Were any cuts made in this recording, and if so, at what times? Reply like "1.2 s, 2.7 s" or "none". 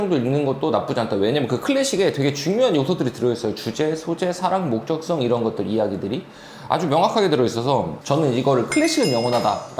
7.9 s